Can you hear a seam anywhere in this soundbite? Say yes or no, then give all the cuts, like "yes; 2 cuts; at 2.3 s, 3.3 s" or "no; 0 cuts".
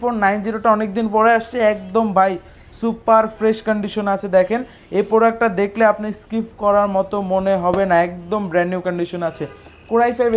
no; 0 cuts